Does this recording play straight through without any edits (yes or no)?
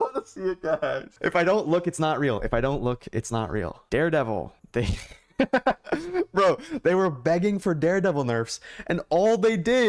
no